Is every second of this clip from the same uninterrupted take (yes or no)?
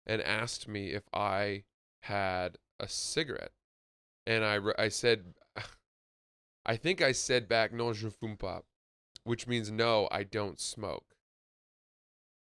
yes